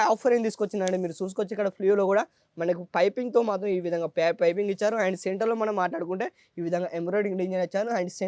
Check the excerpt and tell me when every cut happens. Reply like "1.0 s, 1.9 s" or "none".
none

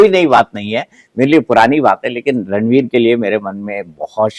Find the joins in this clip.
none

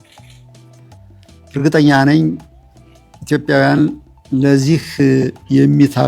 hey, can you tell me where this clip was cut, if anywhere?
1.5 s

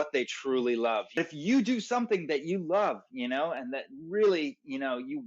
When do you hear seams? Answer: 1.2 s

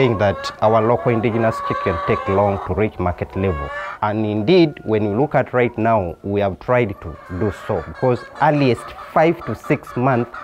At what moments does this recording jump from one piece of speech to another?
3.8 s

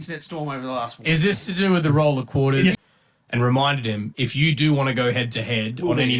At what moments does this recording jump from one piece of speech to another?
2.9 s

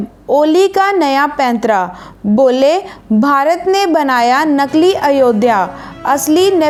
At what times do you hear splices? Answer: none

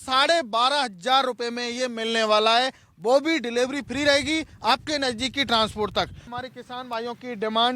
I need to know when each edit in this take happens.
6.2 s

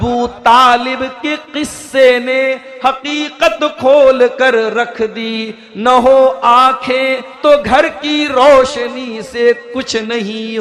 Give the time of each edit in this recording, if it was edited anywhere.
7.3 s

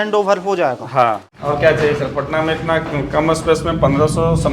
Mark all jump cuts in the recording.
1.3 s

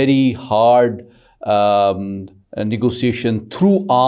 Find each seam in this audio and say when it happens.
none

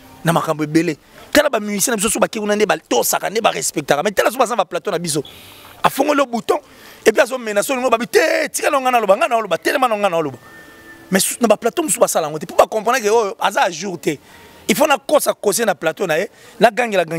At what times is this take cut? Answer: none

